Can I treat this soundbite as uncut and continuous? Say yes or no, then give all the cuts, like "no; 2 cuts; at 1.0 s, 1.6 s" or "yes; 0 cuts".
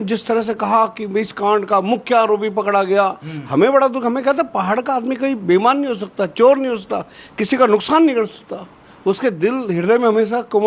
yes; 0 cuts